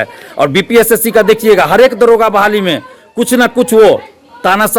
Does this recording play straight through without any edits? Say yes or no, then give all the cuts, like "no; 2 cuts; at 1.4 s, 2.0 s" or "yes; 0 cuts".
yes; 0 cuts